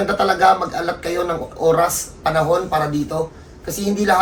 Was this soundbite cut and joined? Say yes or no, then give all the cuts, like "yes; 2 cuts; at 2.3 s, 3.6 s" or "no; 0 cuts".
no; 0 cuts